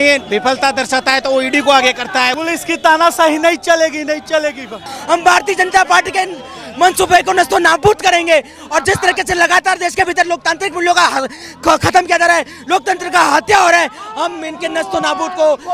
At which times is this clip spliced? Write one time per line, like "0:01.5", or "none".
0:02.3
0:04.9